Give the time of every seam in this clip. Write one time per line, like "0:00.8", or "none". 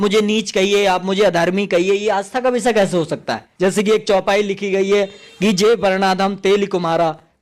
0:03.4